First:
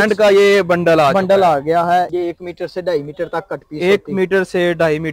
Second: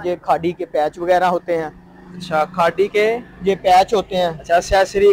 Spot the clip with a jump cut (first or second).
first